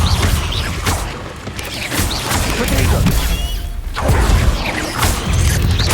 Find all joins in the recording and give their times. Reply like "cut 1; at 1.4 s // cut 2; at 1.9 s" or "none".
cut 1; at 4.6 s